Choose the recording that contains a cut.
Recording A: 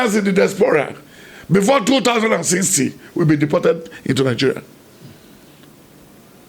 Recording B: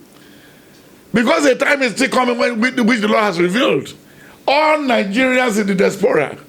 A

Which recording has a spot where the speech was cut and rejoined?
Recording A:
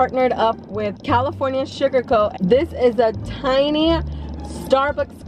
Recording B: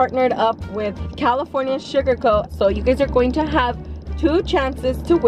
A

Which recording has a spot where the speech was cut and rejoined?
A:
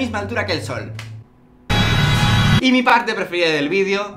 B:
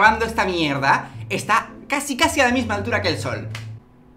A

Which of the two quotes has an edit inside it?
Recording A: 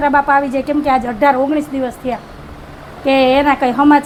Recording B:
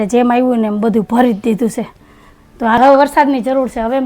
B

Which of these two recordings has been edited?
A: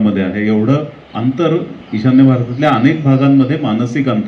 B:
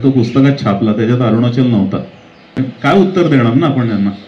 B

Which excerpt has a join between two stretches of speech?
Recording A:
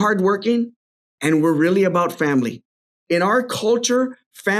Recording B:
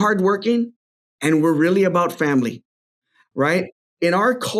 A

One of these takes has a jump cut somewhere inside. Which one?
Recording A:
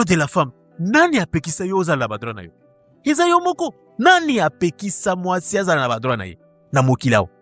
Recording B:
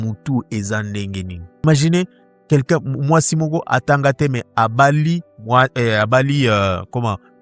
B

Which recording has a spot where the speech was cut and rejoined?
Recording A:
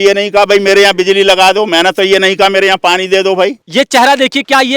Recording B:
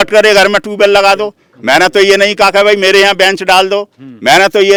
A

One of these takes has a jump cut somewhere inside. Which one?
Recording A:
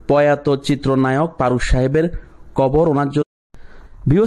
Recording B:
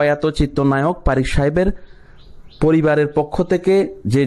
A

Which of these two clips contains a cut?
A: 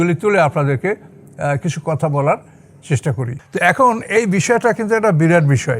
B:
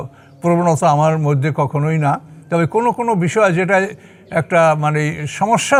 A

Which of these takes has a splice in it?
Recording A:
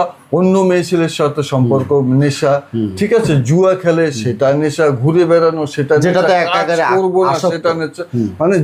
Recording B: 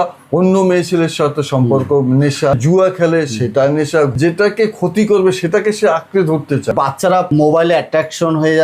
B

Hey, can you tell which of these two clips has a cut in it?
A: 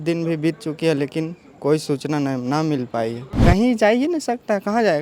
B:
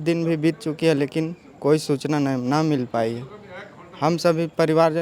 A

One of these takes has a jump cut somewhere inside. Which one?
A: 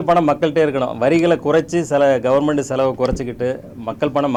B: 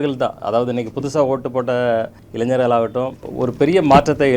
B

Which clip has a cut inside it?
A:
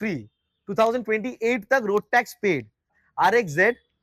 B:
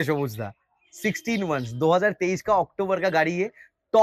A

